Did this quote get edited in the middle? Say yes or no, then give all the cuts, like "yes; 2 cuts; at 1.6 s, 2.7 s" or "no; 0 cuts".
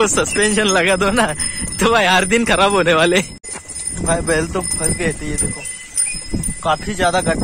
yes; 1 cut; at 3.4 s